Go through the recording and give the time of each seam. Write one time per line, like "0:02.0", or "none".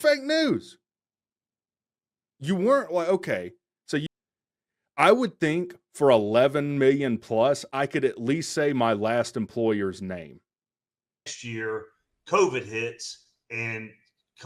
0:04.1